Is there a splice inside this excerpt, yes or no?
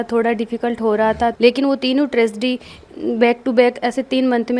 yes